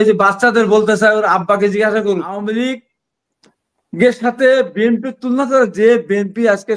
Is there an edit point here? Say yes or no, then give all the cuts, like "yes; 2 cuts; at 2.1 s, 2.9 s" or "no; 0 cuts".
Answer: yes; 1 cut; at 2.3 s